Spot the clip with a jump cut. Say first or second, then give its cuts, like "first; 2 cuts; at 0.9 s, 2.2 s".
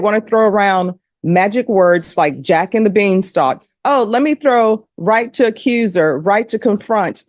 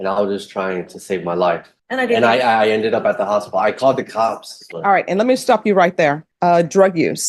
second; 3 cuts; at 1.7 s, 4.5 s, 6.3 s